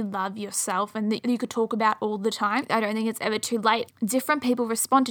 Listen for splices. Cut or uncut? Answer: cut